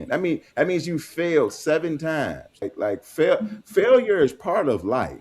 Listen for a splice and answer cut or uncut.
cut